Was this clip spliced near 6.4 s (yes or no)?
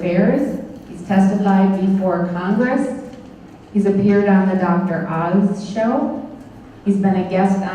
no